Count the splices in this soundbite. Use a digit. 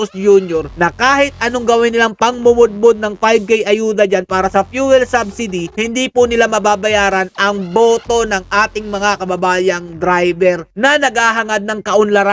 0